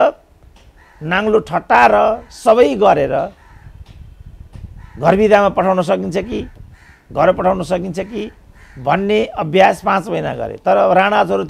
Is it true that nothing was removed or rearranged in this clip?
yes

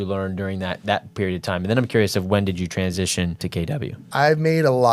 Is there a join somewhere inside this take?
yes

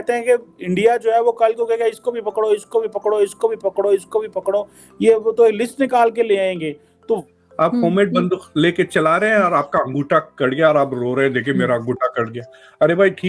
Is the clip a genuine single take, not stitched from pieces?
no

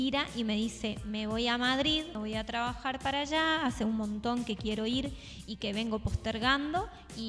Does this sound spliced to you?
yes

